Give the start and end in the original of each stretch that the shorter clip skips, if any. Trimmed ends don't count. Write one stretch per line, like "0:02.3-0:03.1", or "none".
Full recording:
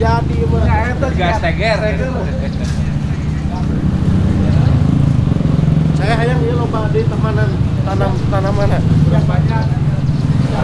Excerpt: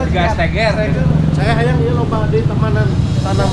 0:02.0-0:05.6